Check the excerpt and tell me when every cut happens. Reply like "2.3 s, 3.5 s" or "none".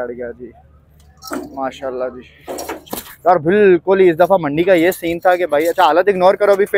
2.9 s